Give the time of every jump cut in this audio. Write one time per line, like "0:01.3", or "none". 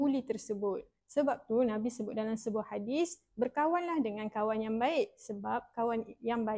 none

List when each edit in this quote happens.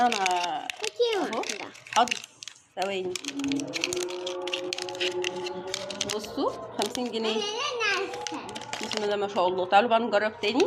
none

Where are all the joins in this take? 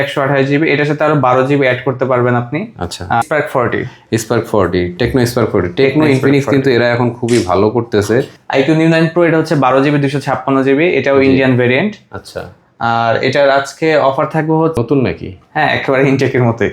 0:03.2
0:08.4
0:14.8

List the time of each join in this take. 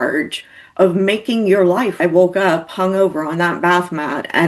0:02.0

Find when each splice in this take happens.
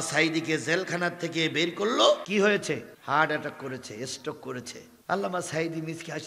0:02.2

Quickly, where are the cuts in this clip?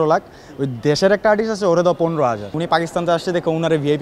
0:02.5

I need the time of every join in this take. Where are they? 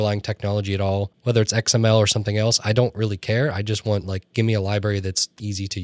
0:01.1

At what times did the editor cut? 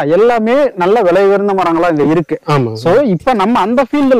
none

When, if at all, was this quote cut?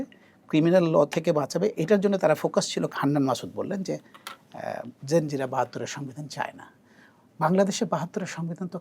0:02.9

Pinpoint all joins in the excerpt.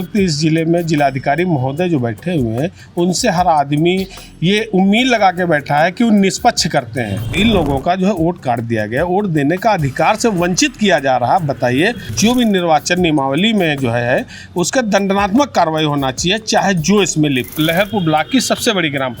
0:07.3
0:12.1
0:17.5

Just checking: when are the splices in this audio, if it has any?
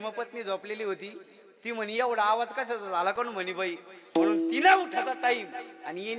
none

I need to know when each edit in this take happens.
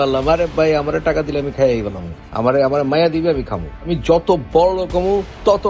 none

